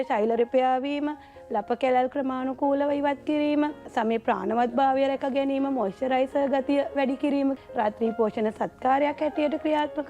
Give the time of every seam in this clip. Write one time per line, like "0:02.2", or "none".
0:03.9
0:07.6